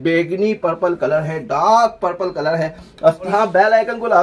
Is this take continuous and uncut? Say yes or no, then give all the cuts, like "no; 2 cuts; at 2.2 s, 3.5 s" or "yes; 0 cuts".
no; 1 cut; at 3.3 s